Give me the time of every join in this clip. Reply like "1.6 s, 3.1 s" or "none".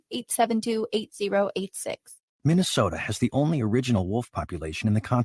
2.2 s